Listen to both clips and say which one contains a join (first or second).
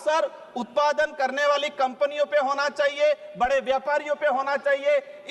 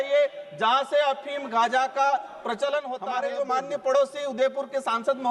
second